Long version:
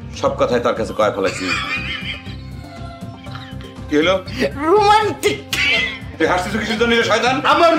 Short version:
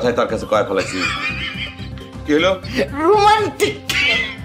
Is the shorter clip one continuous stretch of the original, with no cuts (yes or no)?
no